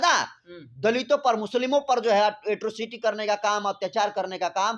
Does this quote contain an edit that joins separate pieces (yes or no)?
no